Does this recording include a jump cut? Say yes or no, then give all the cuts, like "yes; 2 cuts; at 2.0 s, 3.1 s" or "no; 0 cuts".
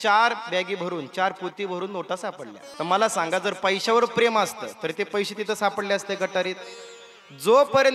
yes; 1 cut; at 2.6 s